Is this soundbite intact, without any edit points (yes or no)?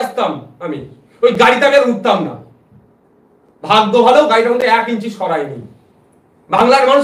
yes